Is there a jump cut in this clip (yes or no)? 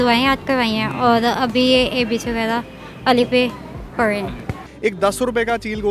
yes